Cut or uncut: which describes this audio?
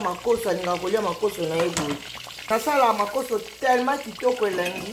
cut